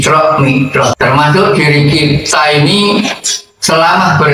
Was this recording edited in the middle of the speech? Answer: yes; 1 cut; at 0.9 s

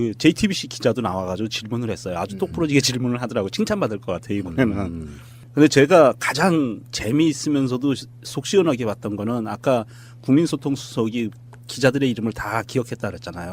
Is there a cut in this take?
yes; 1 cut; at 1.7 s

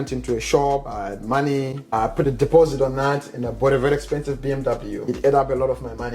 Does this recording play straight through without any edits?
no; 3 cuts; at 0.9 s, 1.9 s, 5.1 s

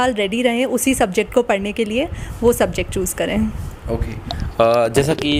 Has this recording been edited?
no; 0 cuts

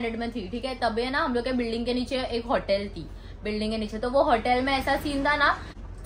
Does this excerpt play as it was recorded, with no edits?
yes; 0 cuts

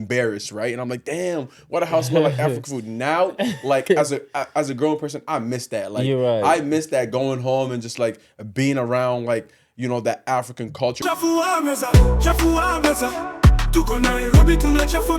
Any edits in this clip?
yes; 1 cut; at 11.0 s

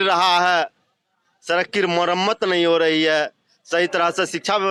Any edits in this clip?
no; 0 cuts

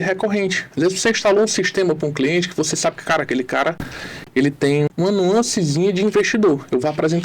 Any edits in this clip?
yes; 1 cut; at 4.9 s

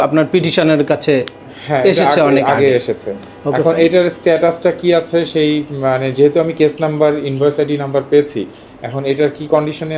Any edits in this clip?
no; 0 cuts

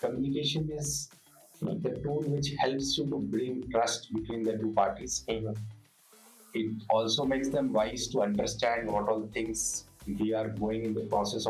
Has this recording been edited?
no; 0 cuts

